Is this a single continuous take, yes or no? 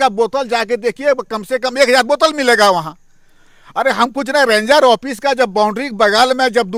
yes